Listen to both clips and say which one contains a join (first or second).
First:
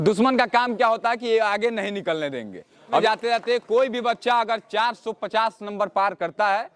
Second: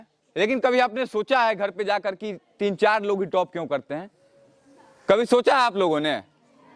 first